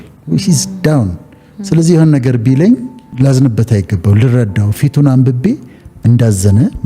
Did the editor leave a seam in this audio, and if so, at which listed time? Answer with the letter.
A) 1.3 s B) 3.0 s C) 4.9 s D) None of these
B